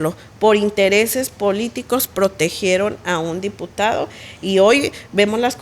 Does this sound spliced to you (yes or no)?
no